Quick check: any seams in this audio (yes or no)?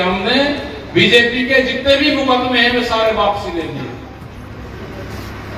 no